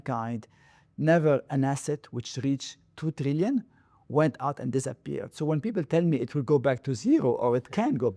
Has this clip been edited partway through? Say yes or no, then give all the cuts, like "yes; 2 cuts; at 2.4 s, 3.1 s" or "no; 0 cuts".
no; 0 cuts